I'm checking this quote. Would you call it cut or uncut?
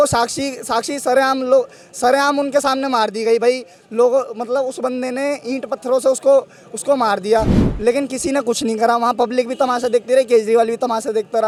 uncut